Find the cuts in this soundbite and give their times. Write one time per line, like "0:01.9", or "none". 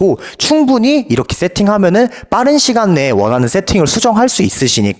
none